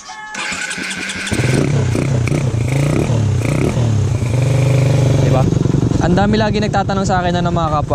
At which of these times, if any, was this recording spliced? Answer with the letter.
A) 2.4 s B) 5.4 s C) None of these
B